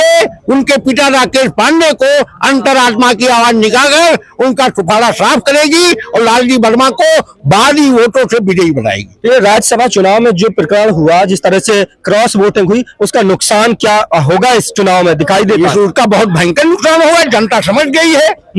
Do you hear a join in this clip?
no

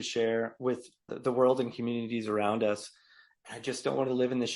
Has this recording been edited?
yes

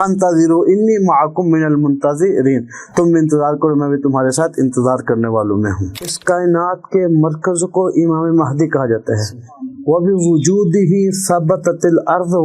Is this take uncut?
no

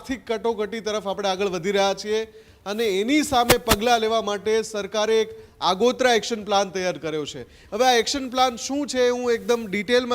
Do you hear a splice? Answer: no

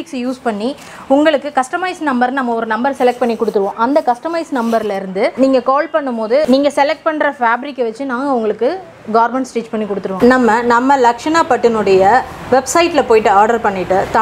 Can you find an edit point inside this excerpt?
yes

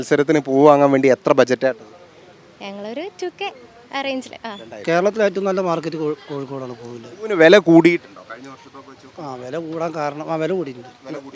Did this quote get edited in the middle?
yes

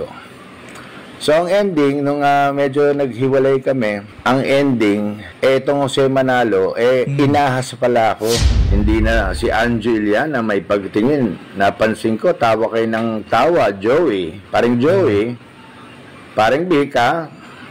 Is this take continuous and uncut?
no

